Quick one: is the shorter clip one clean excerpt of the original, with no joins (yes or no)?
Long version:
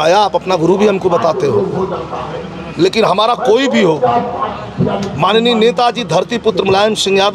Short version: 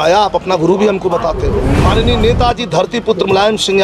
no